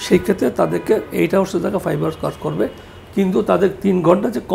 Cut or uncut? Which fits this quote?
uncut